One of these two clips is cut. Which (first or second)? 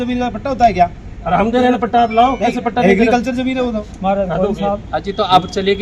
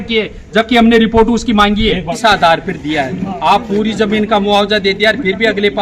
second